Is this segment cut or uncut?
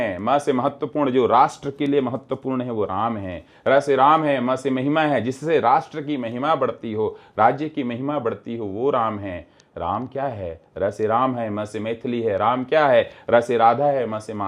uncut